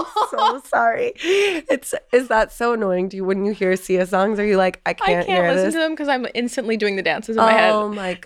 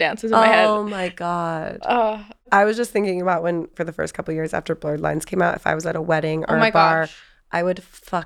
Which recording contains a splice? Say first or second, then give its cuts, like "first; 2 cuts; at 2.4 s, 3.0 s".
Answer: second; 2 cuts; at 2.3 s, 3.7 s